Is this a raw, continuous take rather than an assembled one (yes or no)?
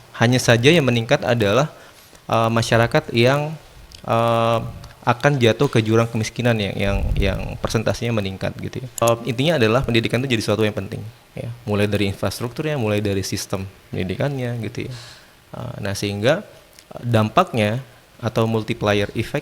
no